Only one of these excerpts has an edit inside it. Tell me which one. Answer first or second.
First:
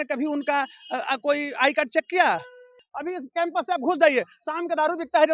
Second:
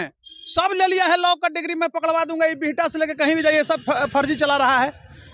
first